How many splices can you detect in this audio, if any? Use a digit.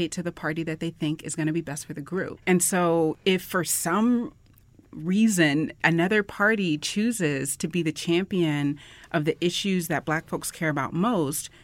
2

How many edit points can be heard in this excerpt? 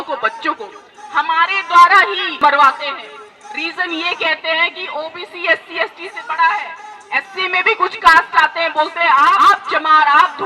2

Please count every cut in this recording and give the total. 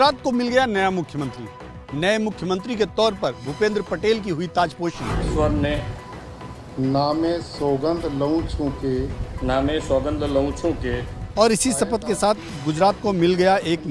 0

